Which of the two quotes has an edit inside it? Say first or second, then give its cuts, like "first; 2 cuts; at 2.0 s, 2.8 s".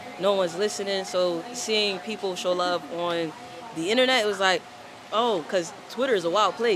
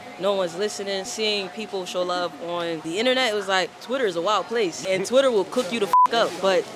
second; 4 cuts; at 1.1 s, 2.8 s, 3.8 s, 4.8 s